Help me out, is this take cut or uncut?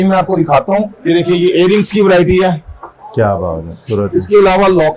cut